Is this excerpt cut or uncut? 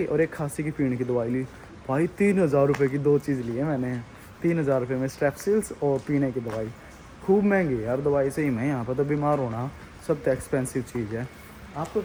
uncut